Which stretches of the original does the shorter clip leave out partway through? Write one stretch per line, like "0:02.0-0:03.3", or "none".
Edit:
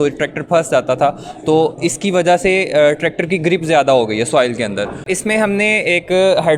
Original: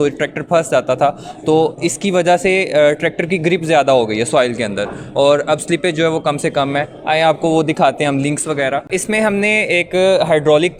0:05.0-0:08.9